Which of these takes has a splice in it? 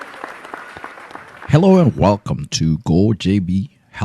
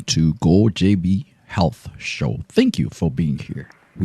first; 1 cut; at 1.2 s

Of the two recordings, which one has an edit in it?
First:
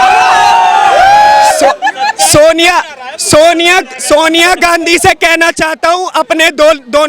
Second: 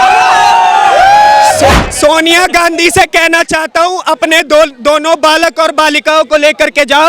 second; 1 cut; at 1.9 s

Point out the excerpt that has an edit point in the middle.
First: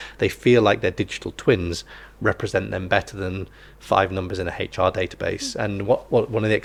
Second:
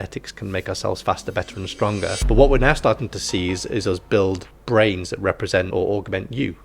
second; 3 cuts; at 2.2 s, 4.5 s, 5.7 s

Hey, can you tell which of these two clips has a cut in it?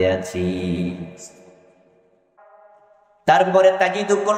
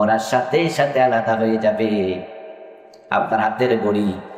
first; 1 cut; at 2.4 s

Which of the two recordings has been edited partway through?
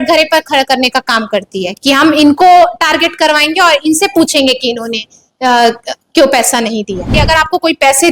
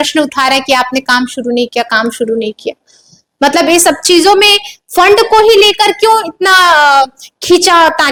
first; 1 cut; at 7.2 s

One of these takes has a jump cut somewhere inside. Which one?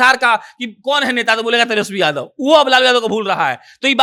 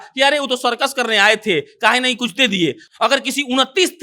second; 1 cut; at 2.8 s

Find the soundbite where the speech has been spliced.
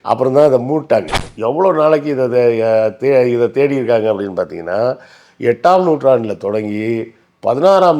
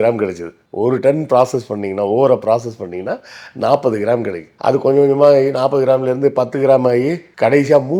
first; 1 cut; at 1.2 s

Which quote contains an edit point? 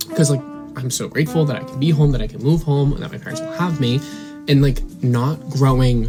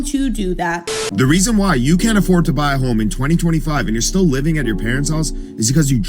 second; 1 cut; at 0.9 s

